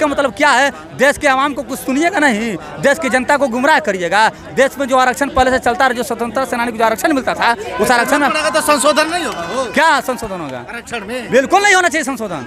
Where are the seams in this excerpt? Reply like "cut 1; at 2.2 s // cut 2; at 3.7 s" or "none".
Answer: none